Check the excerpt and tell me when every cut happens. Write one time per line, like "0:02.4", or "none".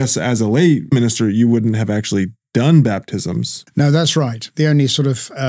0:00.9
0:03.6
0:04.5